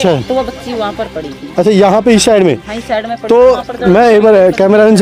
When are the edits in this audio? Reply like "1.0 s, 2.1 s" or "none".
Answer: none